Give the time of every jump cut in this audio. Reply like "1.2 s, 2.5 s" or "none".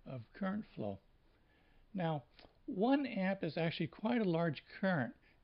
3.4 s

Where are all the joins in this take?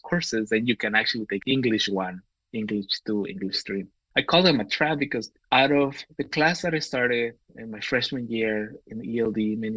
1.4 s, 4.0 s

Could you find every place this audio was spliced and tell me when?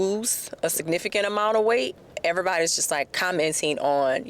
2.0 s, 3.1 s

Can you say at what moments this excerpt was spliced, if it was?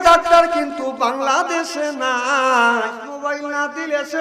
3.0 s

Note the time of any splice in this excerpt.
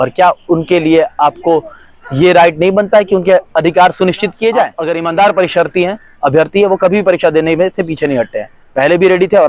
4.8 s

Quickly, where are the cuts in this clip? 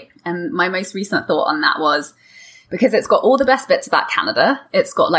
none

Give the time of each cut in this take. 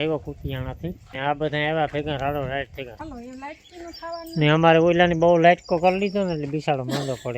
1.1 s, 2.9 s

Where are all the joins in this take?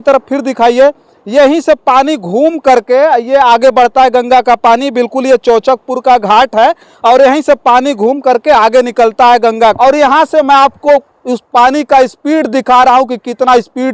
9.7 s

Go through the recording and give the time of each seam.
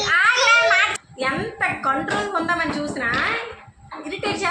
1.0 s

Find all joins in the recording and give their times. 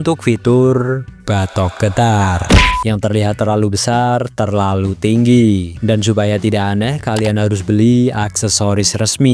2.6 s

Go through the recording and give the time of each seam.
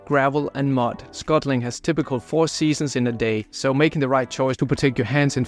3.5 s

